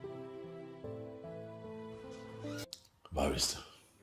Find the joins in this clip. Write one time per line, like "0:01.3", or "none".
0:02.7